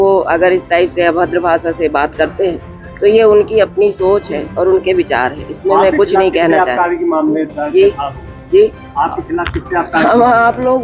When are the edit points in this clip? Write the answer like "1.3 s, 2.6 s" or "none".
none